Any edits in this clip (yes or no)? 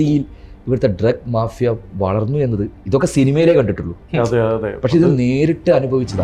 no